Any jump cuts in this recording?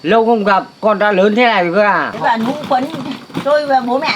yes; 1 cut; at 2.1 s

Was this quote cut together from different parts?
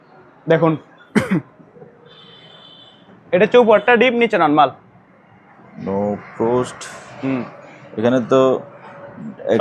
no; 0 cuts

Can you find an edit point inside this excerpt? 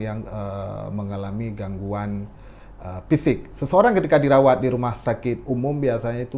no; 0 cuts

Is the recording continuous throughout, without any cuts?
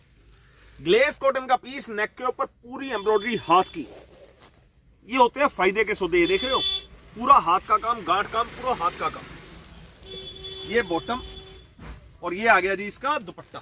yes; 0 cuts

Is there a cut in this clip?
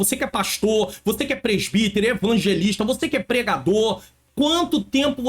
yes; 1 cut; at 4.3 s

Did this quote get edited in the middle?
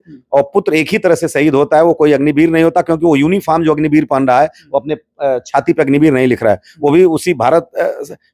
no; 0 cuts

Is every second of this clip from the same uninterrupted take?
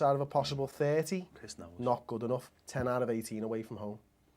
no; 1 cut; at 1.1 s

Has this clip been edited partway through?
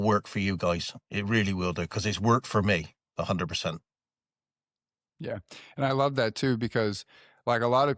no; 0 cuts

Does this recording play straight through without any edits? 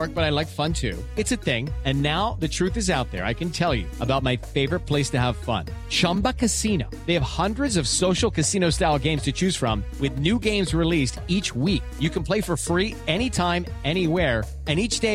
yes; 0 cuts

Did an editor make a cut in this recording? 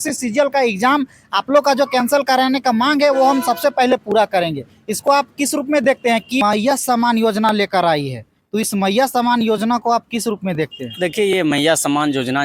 yes; 1 cut; at 6.4 s

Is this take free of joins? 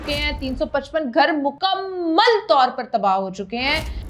no; 1 cut; at 1.6 s

